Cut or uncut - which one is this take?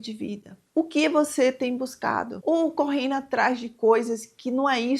cut